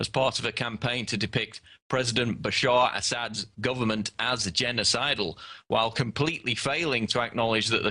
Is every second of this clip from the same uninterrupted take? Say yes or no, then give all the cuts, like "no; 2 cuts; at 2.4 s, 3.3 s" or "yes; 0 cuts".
no; 1 cut; at 6.7 s